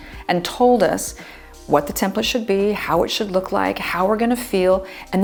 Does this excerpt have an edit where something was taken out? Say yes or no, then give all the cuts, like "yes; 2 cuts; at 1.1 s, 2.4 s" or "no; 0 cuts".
no; 0 cuts